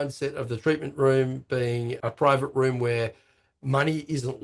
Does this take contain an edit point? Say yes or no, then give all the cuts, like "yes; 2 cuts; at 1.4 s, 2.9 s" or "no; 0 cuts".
yes; 1 cut; at 2.0 s